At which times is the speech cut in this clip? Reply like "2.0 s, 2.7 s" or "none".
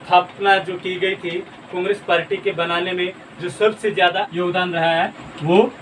4.3 s